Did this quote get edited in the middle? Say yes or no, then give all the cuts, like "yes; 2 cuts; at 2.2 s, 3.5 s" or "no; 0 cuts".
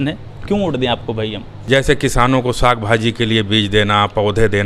yes; 1 cut; at 1.5 s